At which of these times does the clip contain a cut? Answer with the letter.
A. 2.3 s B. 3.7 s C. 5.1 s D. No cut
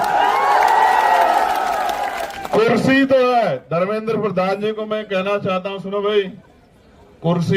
A